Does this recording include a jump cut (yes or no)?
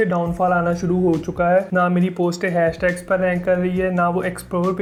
no